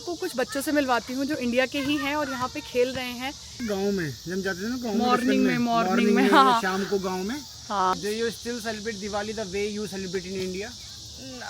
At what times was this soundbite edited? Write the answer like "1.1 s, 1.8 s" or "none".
3.6 s, 7.9 s